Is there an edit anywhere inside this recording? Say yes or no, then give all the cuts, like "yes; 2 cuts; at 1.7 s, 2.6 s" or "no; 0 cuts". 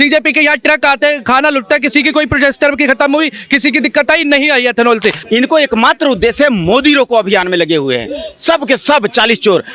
yes; 1 cut; at 5.2 s